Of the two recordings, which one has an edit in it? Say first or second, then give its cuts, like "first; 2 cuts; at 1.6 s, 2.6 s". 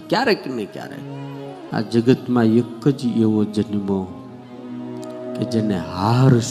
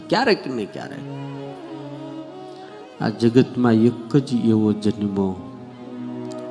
first; 1 cut; at 1.6 s